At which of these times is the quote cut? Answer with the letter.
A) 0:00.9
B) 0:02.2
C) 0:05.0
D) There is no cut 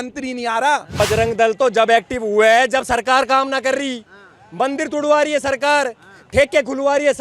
A